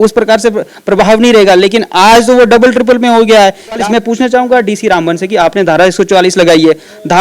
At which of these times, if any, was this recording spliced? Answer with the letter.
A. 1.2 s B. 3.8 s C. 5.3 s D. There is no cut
B